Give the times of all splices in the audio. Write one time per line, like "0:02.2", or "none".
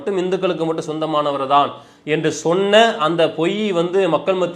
none